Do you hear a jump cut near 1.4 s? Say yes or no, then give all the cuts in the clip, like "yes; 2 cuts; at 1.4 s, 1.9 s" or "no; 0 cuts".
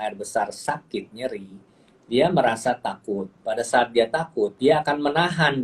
no; 2 cuts; at 3.3 s, 4.5 s